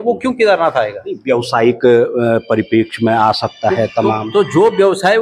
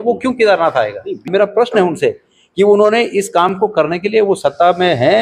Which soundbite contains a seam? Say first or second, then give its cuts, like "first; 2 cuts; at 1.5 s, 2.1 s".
second; 1 cut; at 1.3 s